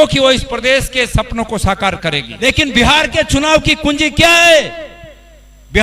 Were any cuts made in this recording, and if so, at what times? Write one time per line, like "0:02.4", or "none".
0:02.3